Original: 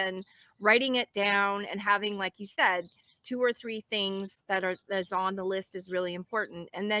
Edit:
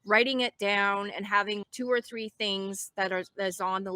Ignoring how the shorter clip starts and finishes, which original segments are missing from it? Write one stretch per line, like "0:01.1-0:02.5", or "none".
0:02.2-0:03.2

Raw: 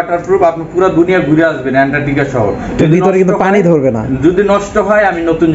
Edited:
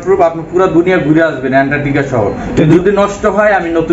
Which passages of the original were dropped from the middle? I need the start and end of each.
0:02.9-0:04.2

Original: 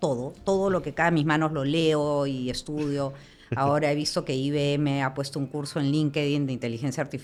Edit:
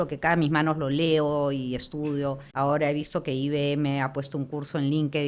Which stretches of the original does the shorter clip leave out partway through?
0:03.2-0:03.5

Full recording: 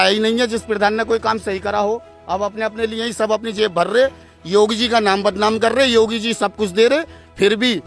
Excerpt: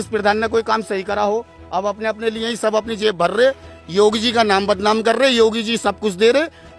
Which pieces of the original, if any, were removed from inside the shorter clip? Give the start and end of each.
none

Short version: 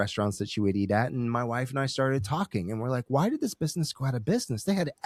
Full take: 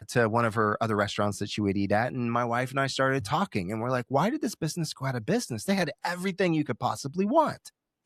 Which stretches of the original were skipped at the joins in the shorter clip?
none

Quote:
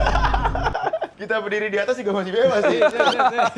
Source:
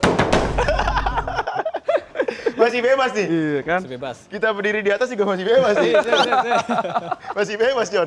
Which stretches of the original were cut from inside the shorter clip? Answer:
0:01.8-0:04.2

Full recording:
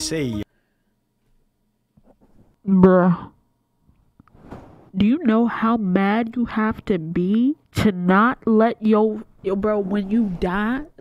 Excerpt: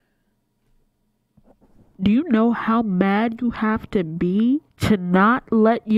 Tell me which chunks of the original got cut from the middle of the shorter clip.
0:02.5-0:04.9

